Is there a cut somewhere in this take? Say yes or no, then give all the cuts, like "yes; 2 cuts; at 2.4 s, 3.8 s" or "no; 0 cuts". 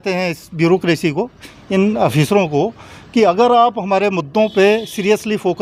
no; 0 cuts